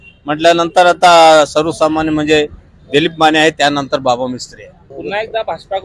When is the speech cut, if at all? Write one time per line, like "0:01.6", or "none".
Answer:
none